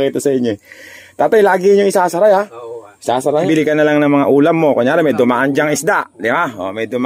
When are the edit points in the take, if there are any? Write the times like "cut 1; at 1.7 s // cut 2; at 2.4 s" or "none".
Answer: cut 1; at 3.5 s